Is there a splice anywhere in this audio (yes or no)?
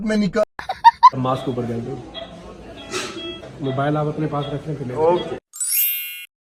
no